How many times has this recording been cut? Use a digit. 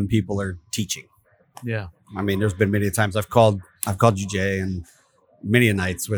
1